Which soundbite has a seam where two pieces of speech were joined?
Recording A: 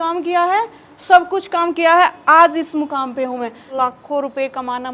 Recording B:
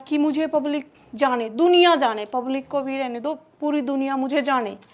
A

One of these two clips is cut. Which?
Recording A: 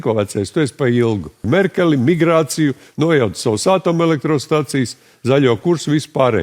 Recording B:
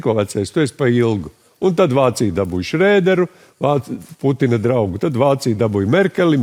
A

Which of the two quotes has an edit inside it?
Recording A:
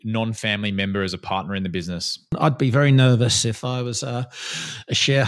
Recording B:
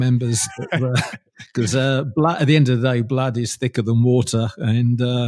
A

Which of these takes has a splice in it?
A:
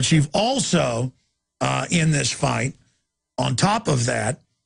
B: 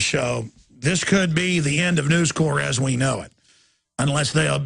B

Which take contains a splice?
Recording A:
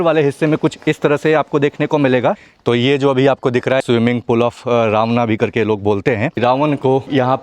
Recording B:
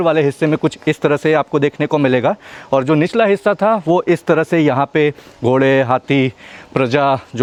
A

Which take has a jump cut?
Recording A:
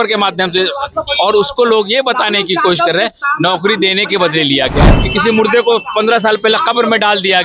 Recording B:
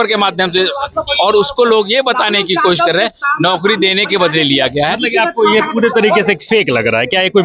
A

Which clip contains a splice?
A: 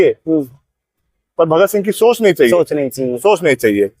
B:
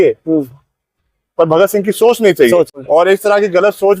B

